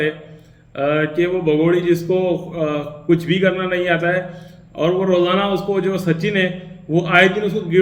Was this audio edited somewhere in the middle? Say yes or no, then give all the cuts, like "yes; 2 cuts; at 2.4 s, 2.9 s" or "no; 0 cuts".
no; 0 cuts